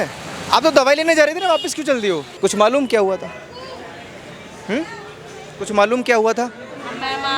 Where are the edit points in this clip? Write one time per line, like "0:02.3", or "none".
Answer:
0:02.3